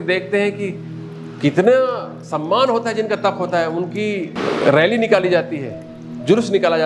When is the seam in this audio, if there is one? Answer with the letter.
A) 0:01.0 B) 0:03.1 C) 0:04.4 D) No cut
C